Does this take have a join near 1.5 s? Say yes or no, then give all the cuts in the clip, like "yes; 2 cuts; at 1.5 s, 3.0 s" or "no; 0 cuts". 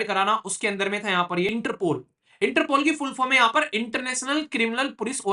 yes; 1 cut; at 1.5 s